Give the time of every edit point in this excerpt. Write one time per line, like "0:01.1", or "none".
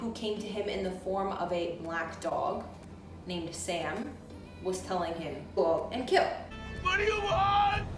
0:06.8

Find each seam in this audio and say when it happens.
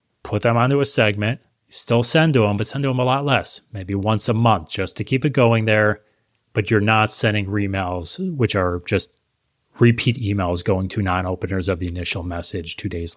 none

